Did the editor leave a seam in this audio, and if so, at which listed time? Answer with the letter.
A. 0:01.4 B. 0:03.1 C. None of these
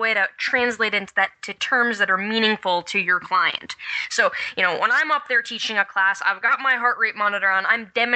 C